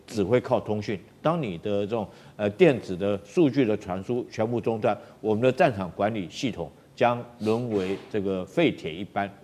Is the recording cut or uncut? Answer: uncut